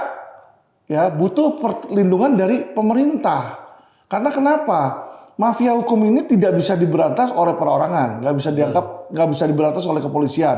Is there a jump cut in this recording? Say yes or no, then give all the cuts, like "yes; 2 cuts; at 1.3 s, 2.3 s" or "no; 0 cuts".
no; 0 cuts